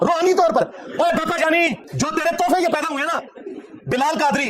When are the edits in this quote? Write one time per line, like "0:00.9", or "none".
0:01.8